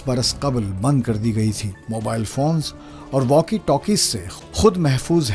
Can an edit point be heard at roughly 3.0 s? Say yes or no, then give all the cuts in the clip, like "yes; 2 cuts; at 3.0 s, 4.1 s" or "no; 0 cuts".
no; 1 cut; at 1.7 s